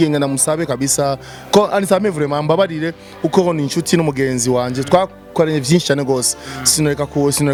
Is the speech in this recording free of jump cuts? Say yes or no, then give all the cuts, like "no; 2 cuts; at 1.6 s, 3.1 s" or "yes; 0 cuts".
yes; 0 cuts